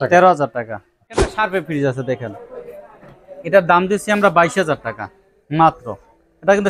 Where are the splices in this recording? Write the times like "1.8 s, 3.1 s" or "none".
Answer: 1.3 s